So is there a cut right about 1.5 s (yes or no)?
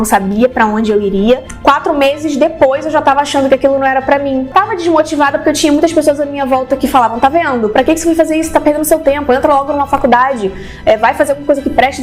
yes